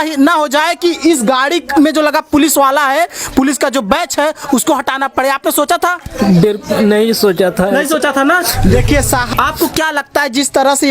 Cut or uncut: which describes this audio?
cut